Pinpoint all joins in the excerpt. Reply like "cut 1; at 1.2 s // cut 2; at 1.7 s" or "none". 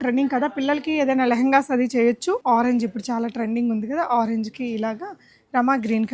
cut 1; at 2.4 s